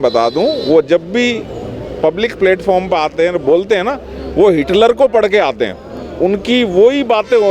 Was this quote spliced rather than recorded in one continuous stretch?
no; 0 cuts

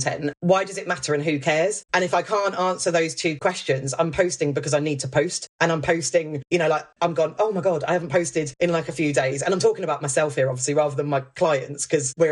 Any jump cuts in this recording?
no; 0 cuts

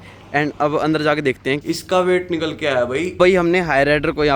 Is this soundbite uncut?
no; 2 cuts; at 1.6 s, 3.2 s

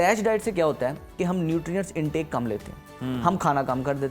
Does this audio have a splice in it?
no; 0 cuts

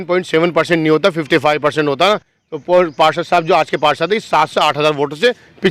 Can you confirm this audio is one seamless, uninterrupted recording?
yes; 0 cuts

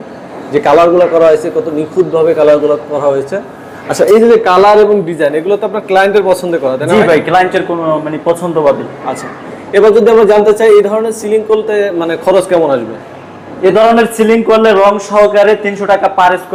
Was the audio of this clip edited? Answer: no; 0 cuts

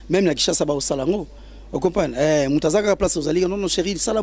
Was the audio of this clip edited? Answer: no; 0 cuts

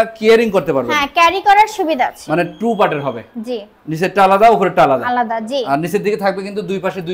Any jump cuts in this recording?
no; 0 cuts

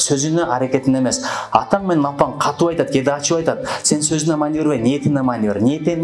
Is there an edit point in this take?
no; 0 cuts

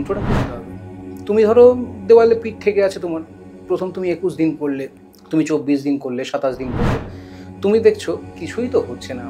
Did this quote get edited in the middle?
no; 0 cuts

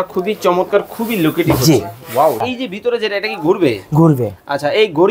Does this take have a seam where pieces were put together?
yes; 1 cut; at 2.4 s

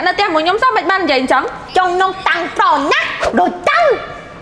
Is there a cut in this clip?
yes; 1 cut; at 1.6 s

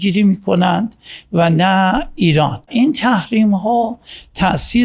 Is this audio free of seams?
no; 1 cut; at 2.7 s

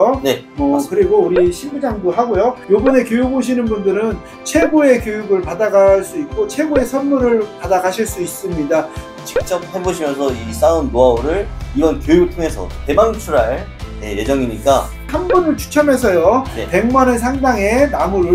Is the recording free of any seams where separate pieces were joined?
no; 3 cuts; at 2.6 s, 9.0 s, 15.1 s

